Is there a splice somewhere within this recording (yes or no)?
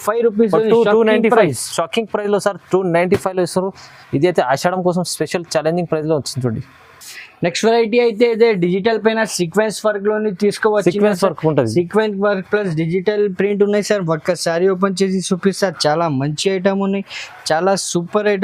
no